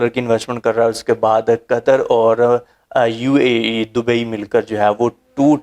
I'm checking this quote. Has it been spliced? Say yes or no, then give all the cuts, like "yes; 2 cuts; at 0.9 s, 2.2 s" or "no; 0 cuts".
no; 0 cuts